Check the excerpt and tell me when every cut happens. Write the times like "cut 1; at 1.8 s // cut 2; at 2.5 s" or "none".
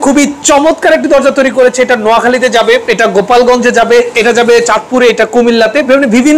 cut 1; at 2.9 s // cut 2; at 4.1 s